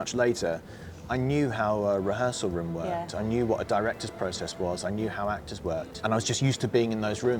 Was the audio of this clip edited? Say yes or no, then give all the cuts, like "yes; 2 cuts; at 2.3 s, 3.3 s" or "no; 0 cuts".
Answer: yes; 1 cut; at 6.0 s